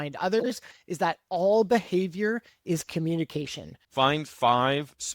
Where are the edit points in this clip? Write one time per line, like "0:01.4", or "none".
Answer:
0:03.8